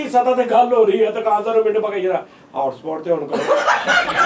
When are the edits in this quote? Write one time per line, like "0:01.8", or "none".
none

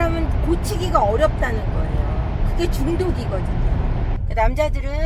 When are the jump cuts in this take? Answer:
0:04.1

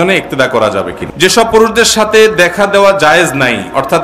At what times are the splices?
0:01.3

